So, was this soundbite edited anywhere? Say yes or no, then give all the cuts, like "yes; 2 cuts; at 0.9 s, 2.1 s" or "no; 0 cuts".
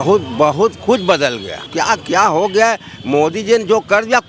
yes; 1 cut; at 1.6 s